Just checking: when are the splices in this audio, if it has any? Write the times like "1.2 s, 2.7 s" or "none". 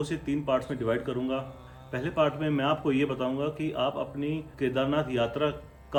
none